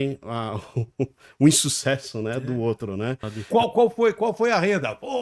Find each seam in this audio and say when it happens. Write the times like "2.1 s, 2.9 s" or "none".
3.3 s